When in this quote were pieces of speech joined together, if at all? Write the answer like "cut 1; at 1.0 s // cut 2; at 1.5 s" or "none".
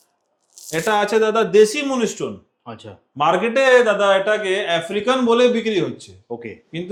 none